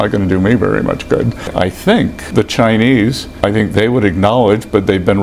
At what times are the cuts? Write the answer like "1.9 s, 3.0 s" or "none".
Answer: 1.5 s, 2.3 s, 3.3 s